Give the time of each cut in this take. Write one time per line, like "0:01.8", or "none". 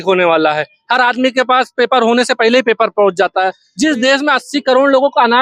0:03.6